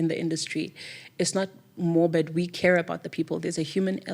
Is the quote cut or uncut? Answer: cut